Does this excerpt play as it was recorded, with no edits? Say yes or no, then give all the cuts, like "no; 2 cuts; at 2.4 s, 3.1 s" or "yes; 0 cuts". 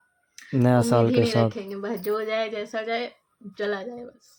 yes; 0 cuts